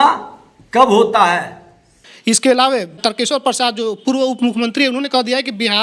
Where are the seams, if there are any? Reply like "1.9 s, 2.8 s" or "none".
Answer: none